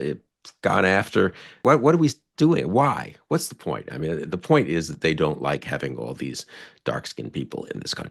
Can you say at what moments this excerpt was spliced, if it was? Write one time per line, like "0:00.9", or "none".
0:01.5